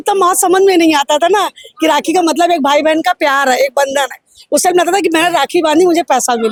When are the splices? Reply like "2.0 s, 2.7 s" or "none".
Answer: none